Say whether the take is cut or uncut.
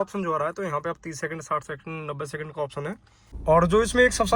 cut